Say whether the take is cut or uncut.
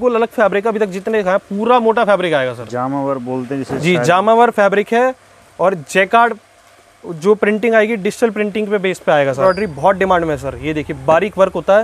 cut